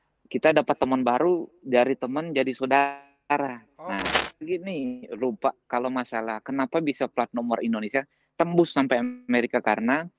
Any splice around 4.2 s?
yes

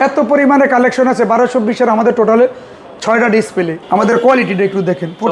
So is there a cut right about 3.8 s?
yes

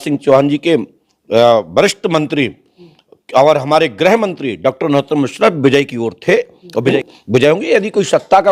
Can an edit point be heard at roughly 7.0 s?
yes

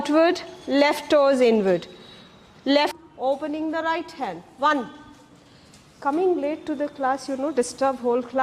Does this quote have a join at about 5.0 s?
no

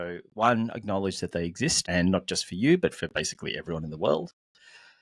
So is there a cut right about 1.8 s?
yes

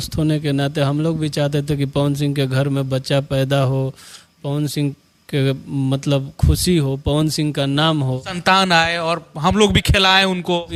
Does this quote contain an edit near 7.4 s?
no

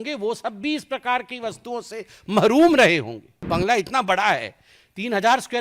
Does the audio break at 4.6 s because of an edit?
no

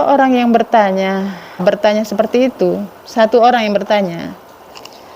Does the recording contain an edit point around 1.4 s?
yes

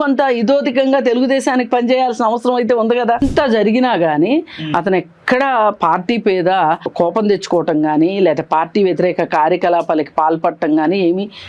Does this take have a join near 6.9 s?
yes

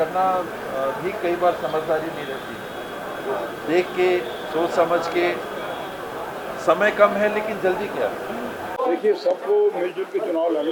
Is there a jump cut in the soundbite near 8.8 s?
yes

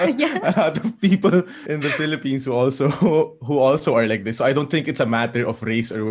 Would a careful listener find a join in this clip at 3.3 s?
no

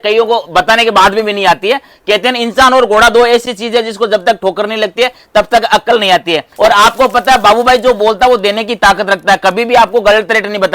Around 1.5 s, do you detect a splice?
no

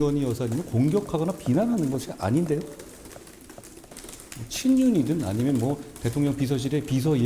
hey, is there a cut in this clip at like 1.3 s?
no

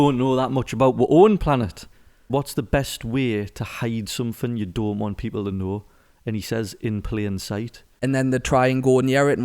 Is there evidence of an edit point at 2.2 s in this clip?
yes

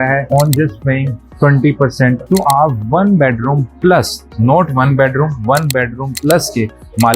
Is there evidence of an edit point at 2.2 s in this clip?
yes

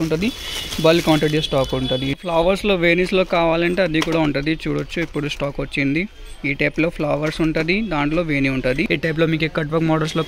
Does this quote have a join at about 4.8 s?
no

